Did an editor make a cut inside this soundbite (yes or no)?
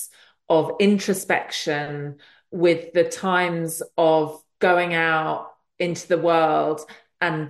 no